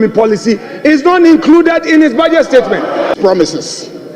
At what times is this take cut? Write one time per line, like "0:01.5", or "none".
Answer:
0:03.1